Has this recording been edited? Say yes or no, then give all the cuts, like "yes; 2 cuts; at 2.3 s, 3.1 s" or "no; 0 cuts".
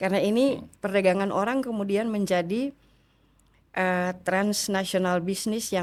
no; 0 cuts